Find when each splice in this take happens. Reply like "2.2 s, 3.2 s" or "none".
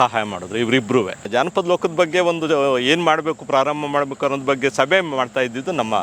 1.3 s